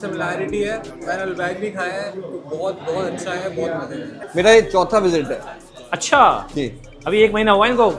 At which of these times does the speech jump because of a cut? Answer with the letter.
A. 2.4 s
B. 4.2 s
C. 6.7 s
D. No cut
B